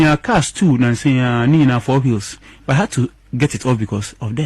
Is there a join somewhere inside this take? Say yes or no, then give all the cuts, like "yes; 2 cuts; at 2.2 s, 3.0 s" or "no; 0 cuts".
no; 0 cuts